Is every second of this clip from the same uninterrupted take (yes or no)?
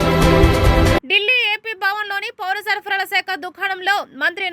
no